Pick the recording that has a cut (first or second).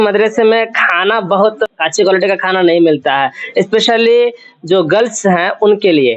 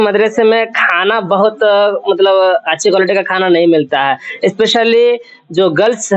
first